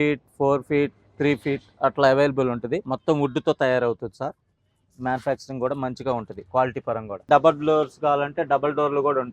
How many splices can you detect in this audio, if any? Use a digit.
2